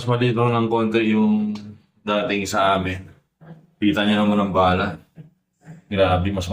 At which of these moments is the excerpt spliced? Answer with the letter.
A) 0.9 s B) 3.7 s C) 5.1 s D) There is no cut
D